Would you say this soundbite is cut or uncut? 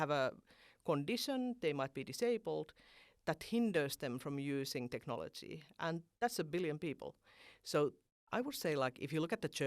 cut